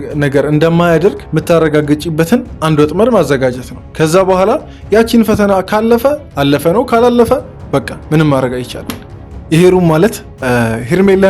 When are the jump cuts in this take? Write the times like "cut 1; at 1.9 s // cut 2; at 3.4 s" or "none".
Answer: cut 1; at 9.0 s